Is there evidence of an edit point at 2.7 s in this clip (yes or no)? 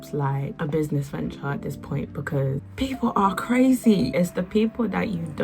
yes